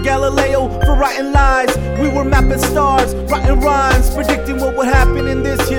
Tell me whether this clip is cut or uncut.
uncut